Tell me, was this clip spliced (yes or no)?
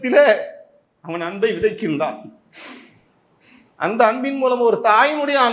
no